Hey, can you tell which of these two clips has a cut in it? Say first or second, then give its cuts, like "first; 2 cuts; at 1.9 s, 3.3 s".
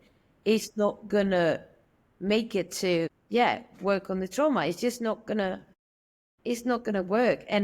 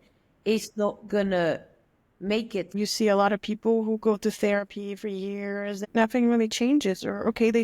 second; 2 cuts; at 2.7 s, 5.8 s